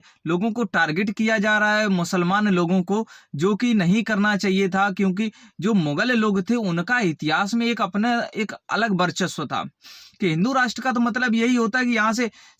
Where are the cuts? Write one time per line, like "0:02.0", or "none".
0:10.0